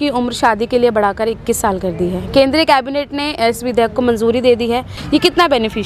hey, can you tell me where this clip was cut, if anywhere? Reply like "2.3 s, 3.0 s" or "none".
4.9 s